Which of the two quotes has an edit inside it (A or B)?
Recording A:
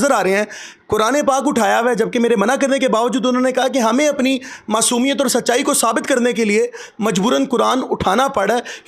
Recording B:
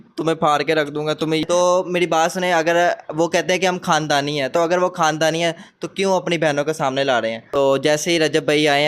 B